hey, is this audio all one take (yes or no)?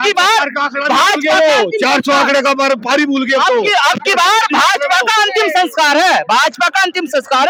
yes